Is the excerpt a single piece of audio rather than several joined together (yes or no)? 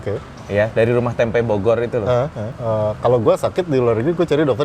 no